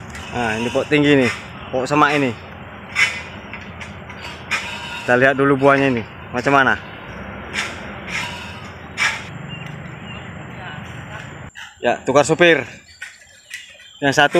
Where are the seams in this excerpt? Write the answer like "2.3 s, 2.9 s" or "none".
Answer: 9.3 s